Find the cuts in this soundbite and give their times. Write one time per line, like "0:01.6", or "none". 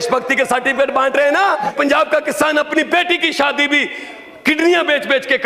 0:01.7